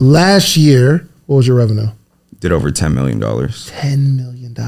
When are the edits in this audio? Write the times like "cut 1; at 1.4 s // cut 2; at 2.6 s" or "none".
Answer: cut 1; at 1.2 s